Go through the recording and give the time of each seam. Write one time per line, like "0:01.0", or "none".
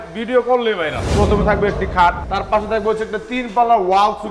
0:01.0
0:02.2